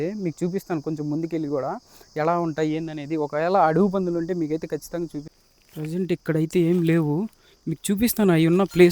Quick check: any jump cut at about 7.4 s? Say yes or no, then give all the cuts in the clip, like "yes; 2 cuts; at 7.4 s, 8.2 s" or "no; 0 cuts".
no; 1 cut; at 5.4 s